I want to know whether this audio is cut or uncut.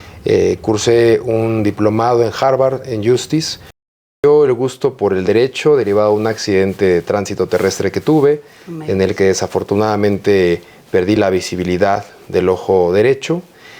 cut